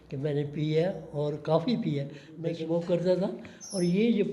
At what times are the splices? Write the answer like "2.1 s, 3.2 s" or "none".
2.2 s